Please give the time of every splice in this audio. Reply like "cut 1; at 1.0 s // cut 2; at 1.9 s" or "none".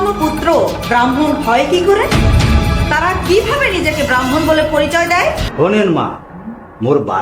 cut 1; at 5.5 s